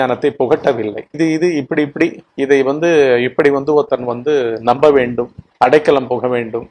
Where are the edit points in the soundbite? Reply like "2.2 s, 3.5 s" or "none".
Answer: 1.1 s